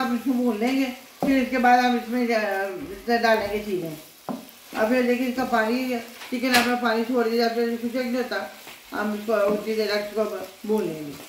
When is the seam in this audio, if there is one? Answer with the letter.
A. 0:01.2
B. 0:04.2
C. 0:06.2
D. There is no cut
D